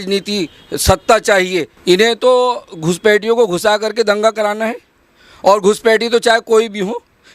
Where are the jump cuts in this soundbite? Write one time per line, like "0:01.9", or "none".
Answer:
0:01.7